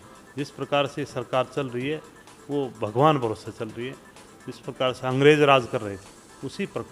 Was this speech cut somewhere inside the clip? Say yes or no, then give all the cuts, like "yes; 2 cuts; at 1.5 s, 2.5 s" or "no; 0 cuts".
yes; 1 cut; at 4.2 s